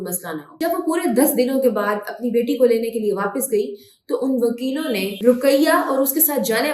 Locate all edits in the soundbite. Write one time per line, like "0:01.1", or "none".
none